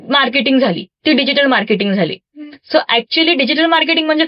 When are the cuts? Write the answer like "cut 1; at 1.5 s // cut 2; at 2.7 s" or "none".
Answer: none

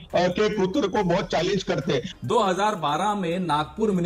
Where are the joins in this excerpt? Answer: cut 1; at 2.0 s

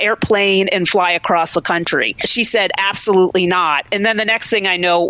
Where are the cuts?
cut 1; at 2.3 s

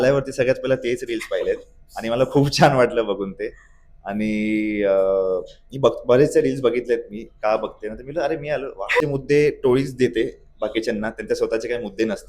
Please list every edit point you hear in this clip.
cut 1; at 9.0 s

